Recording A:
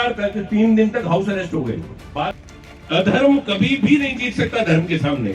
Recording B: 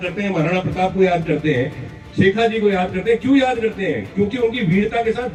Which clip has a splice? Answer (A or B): A